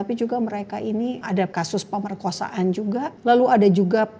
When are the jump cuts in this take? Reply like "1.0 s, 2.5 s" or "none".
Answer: 1.4 s, 3.1 s